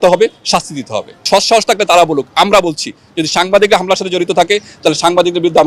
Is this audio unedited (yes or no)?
no